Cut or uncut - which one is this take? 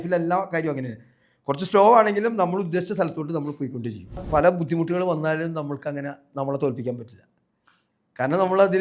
cut